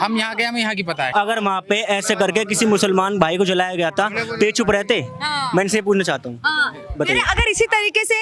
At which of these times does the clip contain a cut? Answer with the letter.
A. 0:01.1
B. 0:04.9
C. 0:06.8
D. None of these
A